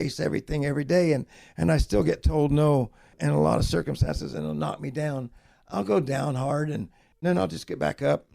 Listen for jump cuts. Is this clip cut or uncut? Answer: cut